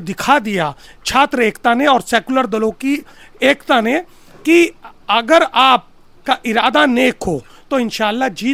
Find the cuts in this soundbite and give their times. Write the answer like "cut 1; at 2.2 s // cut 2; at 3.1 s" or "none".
none